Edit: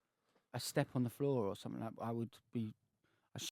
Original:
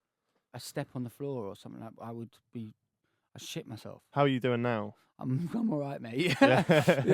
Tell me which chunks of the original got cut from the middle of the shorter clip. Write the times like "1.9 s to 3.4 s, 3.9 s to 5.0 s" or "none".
none